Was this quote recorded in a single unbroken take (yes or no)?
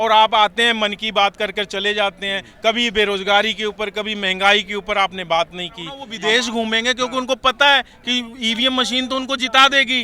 no